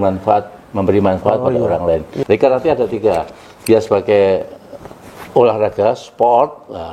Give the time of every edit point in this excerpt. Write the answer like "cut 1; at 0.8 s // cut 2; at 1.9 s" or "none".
cut 1; at 2.1 s